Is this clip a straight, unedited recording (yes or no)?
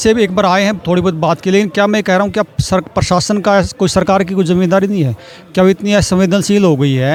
yes